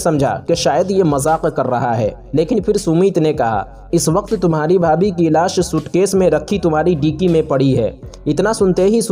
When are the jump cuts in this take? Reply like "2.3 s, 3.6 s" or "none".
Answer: none